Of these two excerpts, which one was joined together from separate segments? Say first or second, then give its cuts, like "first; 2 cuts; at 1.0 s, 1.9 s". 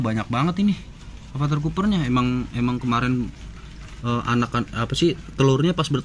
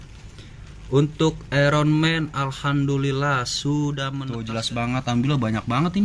second; 1 cut; at 4.3 s